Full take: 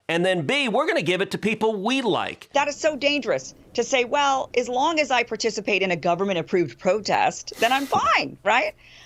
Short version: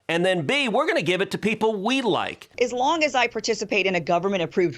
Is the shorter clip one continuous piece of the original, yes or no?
no